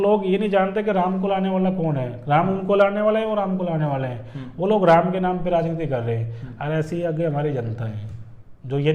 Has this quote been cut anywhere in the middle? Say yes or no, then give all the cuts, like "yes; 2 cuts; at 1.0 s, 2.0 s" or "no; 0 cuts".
no; 0 cuts